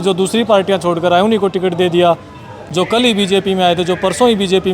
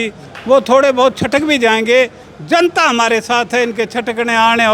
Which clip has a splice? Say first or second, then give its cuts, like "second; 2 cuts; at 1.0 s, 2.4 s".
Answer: first; 1 cut; at 2.6 s